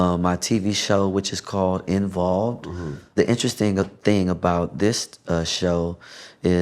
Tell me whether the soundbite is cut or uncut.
cut